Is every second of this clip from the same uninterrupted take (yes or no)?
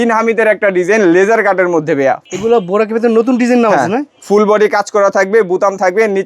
no